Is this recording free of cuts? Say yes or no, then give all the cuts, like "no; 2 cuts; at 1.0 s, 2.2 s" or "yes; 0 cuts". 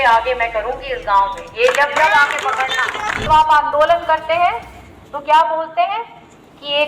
no; 1 cut; at 3.3 s